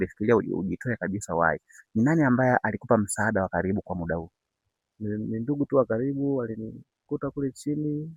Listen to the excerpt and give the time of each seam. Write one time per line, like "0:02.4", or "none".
none